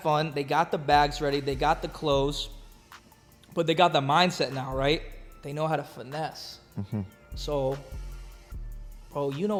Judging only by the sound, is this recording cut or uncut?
uncut